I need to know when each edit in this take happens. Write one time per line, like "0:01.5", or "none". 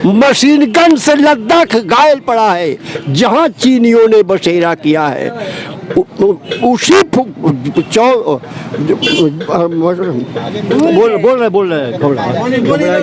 none